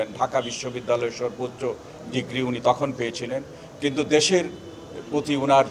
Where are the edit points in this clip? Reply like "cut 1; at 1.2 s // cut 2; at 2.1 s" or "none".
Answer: none